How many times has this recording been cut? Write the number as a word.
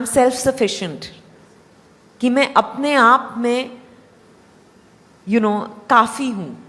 zero